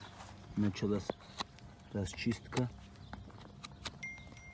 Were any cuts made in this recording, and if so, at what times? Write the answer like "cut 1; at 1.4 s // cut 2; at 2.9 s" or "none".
none